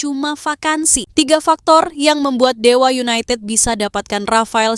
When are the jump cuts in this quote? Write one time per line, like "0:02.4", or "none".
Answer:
0:01.1